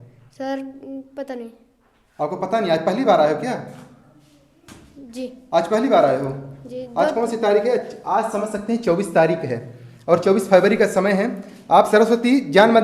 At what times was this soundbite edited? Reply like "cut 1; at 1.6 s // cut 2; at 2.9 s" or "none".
none